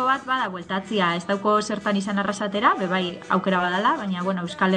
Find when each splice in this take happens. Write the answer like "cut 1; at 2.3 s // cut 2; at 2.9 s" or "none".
none

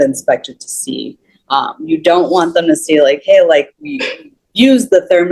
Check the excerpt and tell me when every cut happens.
none

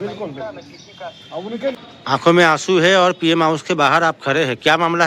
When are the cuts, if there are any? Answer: cut 1; at 1.7 s

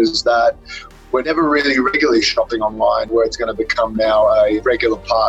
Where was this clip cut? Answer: cut 1; at 1.3 s // cut 2; at 3.1 s // cut 3; at 4.6 s

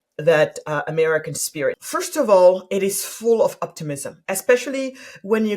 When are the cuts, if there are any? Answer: cut 1; at 1.9 s

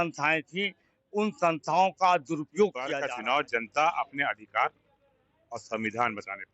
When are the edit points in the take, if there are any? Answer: cut 1; at 3.0 s

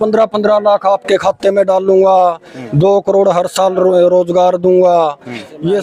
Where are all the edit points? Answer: none

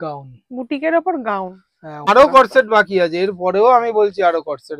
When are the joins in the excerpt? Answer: cut 1; at 2.1 s

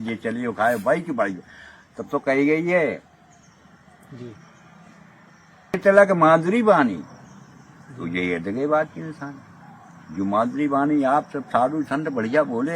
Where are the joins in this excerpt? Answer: cut 1; at 5.8 s

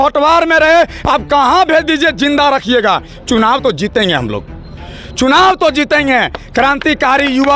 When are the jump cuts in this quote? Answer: none

